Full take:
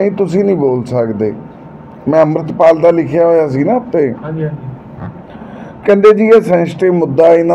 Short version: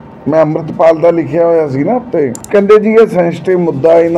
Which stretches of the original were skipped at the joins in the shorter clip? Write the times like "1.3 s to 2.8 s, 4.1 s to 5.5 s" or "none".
4.2 s to 5.7 s

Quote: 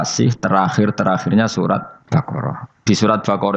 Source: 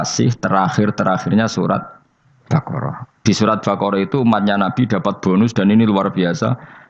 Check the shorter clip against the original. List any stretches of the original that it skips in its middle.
1.9 s to 2.3 s

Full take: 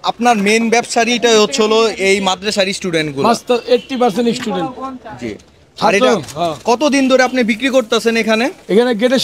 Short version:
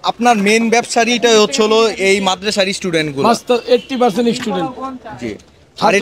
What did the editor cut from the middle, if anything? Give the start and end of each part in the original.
none

